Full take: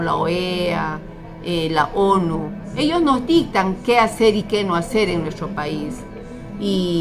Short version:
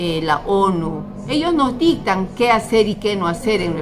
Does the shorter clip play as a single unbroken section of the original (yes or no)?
yes